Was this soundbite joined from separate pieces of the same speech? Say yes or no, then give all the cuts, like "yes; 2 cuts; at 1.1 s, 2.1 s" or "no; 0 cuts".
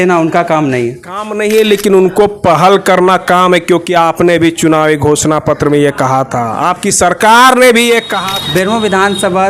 yes; 2 cuts; at 1.3 s, 8.1 s